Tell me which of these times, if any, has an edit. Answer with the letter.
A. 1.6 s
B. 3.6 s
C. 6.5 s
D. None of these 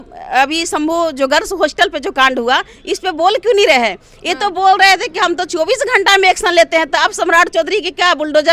D